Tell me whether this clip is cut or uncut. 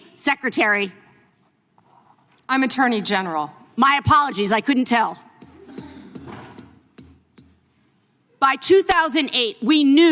uncut